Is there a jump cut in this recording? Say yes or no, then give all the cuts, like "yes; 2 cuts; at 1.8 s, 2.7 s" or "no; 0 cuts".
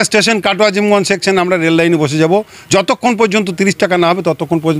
no; 0 cuts